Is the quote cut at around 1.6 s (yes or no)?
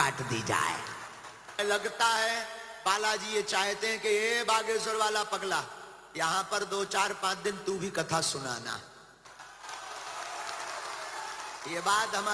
yes